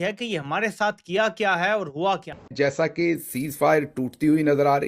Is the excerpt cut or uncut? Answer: cut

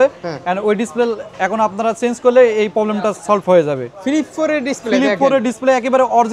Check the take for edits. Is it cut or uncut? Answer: cut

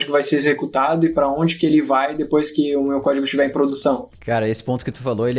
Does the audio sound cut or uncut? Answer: cut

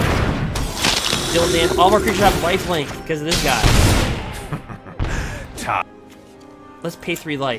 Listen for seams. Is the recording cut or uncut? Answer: cut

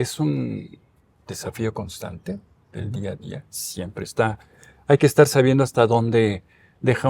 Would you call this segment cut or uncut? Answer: uncut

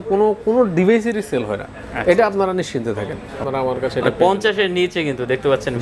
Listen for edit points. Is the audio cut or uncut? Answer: cut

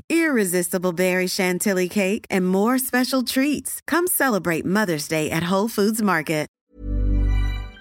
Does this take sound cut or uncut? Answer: cut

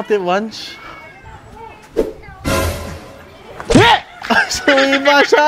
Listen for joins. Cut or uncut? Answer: uncut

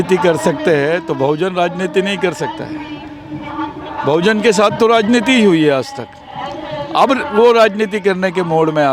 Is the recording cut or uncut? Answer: uncut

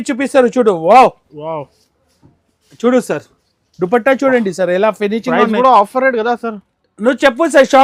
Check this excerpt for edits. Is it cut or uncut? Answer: uncut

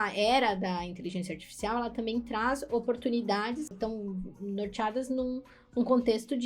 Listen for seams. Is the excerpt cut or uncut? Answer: cut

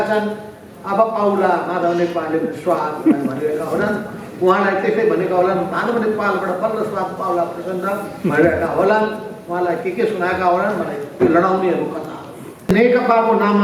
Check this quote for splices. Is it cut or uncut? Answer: cut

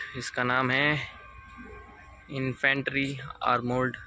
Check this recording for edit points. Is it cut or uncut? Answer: uncut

